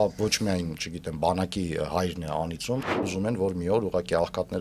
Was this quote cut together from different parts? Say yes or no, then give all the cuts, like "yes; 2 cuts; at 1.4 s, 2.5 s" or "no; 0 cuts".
yes; 1 cut; at 2.9 s